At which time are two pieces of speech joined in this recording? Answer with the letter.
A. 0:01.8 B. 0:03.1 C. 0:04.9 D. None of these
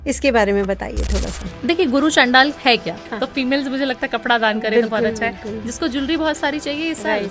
B